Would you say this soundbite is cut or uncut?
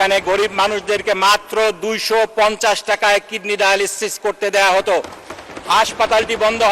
uncut